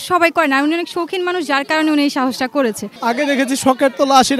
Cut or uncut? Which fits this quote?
cut